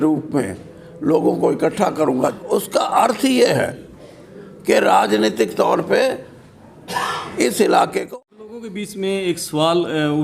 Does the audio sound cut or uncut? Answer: cut